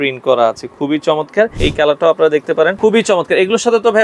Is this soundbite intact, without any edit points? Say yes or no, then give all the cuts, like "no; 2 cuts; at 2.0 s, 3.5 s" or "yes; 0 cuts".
no; 2 cuts; at 1.6 s, 2.8 s